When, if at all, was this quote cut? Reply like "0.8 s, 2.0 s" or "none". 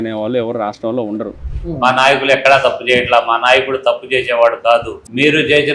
1.5 s